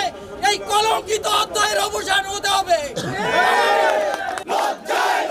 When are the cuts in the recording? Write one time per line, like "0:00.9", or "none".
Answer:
none

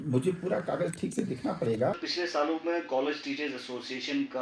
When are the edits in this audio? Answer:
0:01.9

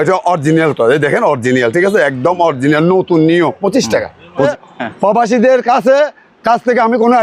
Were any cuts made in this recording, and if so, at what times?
0:04.5

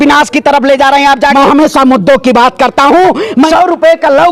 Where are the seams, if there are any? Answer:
0:01.3
0:03.5

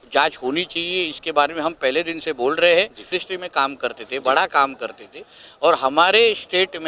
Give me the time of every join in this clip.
0:03.1

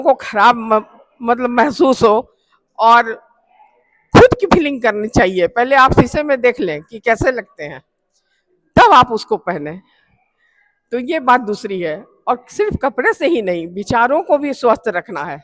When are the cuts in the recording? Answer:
none

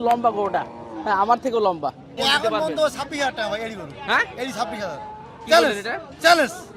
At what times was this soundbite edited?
0:02.2

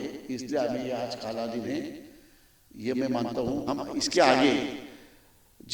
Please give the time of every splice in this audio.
0:03.6

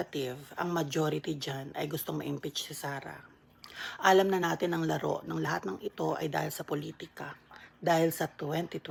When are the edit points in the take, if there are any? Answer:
none

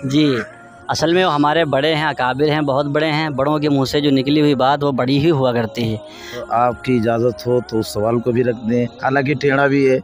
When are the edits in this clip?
0:06.4

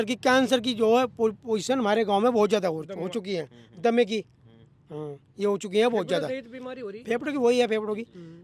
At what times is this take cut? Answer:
none

